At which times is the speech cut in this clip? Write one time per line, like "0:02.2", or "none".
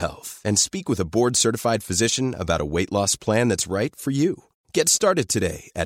none